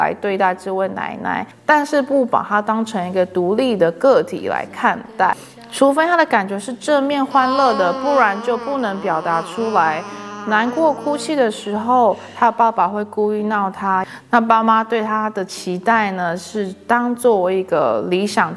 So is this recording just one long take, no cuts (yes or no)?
no